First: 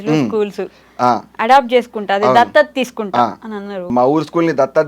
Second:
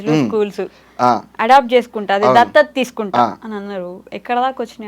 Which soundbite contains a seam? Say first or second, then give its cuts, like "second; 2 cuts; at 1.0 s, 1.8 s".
first; 1 cut; at 3.9 s